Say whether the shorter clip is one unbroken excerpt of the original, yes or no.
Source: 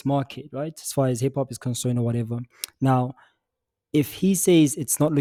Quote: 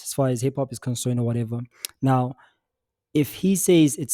yes